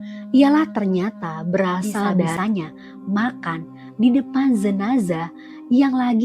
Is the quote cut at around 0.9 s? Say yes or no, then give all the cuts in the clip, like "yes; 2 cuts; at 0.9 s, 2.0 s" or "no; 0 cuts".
no; 1 cut; at 2.3 s